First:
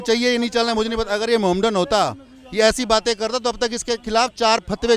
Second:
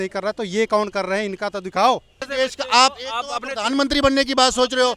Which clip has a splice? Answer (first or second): second